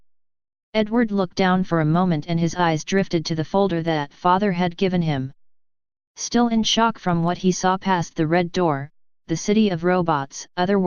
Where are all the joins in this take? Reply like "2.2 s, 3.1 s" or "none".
1.2 s